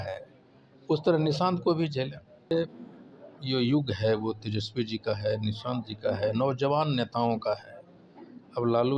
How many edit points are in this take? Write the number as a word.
one